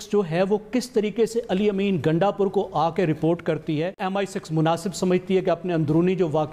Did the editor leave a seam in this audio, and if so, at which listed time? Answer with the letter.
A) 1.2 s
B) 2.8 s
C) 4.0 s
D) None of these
C